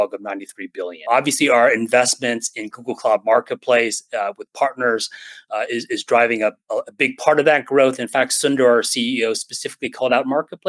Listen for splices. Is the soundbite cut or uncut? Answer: cut